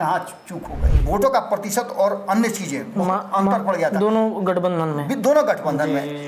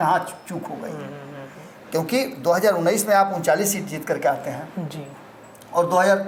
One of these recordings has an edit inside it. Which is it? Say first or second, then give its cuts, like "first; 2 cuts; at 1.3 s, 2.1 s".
first; 1 cut; at 0.9 s